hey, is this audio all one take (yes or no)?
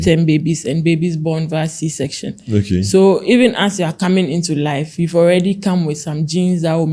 yes